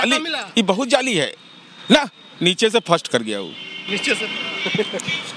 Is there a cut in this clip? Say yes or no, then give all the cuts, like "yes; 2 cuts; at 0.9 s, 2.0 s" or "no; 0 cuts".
no; 0 cuts